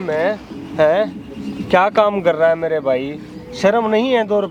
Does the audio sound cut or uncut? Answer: uncut